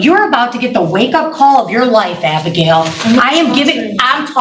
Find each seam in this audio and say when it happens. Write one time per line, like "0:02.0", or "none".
none